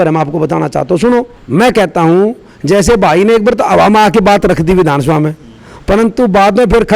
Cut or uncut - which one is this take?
cut